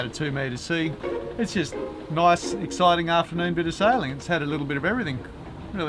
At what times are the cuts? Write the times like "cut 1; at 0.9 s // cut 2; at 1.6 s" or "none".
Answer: cut 1; at 1.0 s